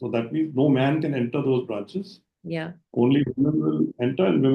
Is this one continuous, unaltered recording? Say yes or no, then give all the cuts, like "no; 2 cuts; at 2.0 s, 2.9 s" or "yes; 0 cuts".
yes; 0 cuts